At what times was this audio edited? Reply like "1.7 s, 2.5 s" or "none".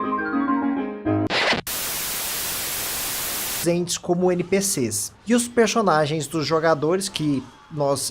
none